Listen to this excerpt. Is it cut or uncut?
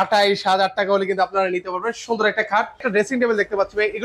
cut